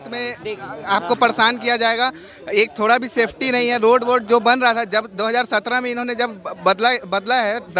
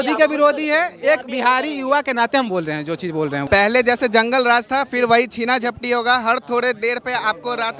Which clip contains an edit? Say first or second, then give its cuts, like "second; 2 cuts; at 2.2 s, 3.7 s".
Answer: second; 1 cut; at 3.4 s